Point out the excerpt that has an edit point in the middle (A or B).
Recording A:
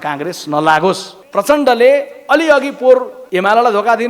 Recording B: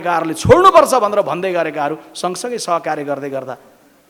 A